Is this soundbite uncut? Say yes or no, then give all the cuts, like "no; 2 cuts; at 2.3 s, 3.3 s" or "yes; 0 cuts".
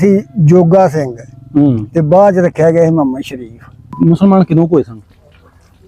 no; 1 cut; at 3.9 s